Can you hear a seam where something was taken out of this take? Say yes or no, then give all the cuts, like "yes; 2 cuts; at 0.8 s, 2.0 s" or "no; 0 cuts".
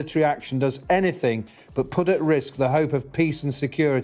no; 0 cuts